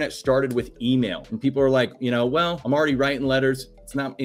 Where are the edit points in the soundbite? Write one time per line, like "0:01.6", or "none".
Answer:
0:01.2
0:02.6